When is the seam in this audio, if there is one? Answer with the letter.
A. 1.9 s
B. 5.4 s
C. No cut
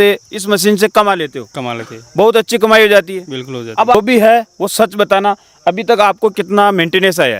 C